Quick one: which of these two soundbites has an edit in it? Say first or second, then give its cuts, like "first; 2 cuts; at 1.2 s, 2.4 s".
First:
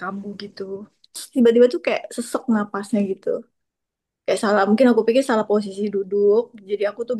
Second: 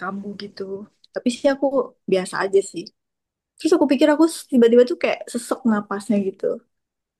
first; 1 cut; at 1.2 s